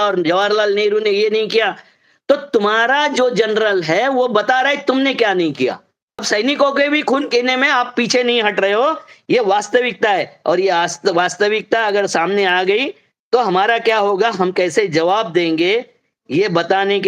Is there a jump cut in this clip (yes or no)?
yes